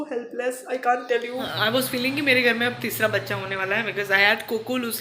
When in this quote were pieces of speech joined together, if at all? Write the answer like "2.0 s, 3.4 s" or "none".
1.5 s